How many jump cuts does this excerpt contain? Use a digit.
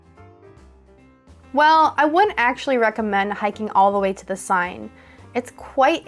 1